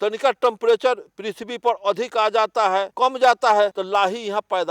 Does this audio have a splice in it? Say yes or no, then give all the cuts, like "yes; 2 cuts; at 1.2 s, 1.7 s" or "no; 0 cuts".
yes; 2 cuts; at 2.9 s, 3.8 s